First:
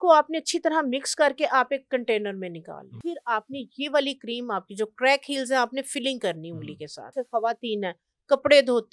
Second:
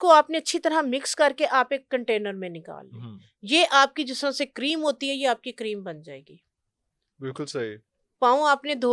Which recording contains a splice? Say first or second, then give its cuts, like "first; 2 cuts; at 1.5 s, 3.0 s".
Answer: first; 2 cuts; at 3.0 s, 7.1 s